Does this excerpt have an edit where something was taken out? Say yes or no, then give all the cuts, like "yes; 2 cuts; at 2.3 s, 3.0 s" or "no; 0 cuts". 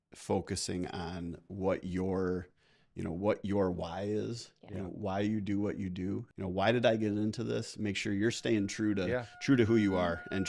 yes; 1 cut; at 6.3 s